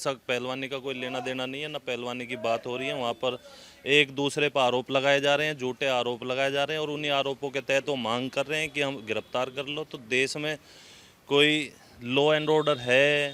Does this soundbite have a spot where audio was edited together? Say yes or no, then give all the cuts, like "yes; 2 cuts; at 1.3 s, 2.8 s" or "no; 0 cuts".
no; 0 cuts